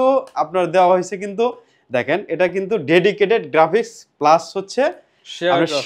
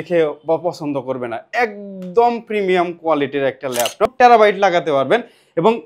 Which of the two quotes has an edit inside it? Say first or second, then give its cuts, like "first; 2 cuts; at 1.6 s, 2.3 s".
second; 1 cut; at 4.1 s